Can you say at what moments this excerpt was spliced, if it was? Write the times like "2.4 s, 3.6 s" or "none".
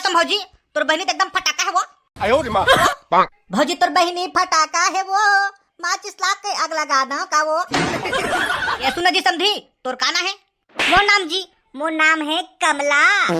2.8 s, 8.8 s